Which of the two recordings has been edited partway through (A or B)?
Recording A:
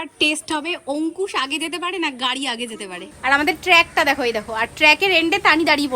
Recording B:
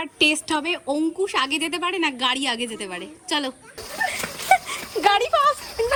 A